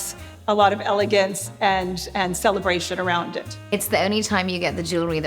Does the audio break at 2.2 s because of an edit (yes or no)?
no